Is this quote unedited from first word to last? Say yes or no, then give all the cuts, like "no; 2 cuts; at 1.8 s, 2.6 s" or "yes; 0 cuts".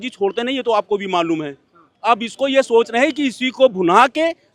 yes; 0 cuts